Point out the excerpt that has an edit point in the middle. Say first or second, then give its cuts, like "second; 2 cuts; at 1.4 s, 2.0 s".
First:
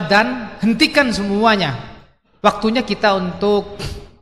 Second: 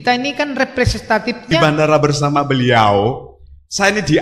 second; 1 cut; at 1.6 s